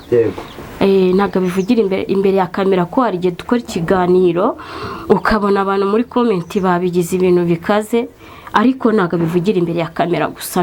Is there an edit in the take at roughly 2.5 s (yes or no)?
no